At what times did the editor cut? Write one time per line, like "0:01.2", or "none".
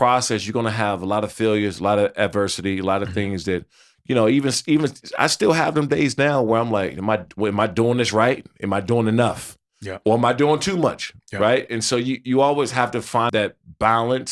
0:13.3

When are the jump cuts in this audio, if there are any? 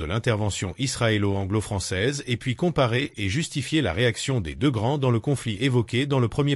none

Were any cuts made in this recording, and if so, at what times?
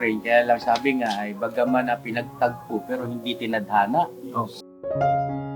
0:04.6

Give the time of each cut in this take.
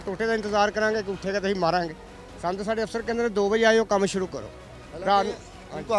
none

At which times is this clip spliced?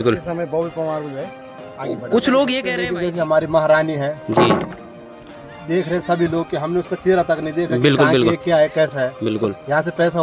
0:02.8

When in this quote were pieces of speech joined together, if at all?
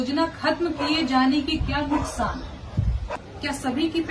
0:03.2

